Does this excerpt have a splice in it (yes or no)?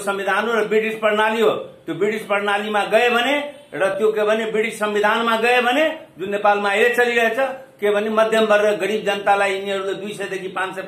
no